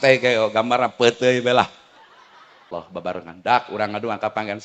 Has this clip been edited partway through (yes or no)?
yes